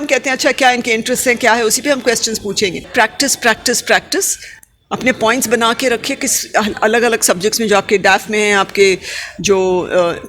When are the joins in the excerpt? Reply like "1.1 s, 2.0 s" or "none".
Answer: 2.9 s